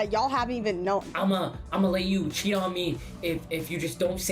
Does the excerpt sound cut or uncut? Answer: cut